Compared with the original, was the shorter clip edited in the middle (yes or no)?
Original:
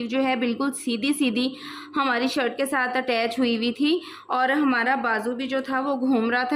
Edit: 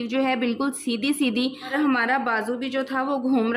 yes